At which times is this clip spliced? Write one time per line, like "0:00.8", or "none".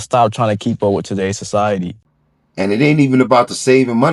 0:01.9